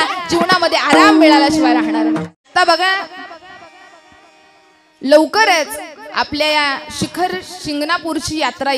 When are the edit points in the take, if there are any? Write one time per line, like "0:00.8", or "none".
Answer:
0:02.2